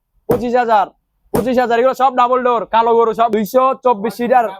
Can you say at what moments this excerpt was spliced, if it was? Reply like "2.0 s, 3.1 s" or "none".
3.3 s